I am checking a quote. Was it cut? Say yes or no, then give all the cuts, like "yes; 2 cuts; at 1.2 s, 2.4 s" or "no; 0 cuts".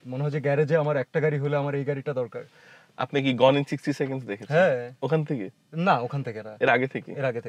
no; 0 cuts